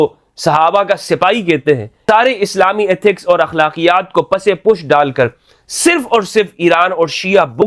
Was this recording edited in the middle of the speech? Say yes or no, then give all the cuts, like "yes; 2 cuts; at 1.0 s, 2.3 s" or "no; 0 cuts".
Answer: yes; 1 cut; at 1.9 s